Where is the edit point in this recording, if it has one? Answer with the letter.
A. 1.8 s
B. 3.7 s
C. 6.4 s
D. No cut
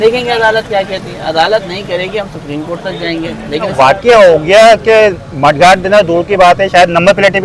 B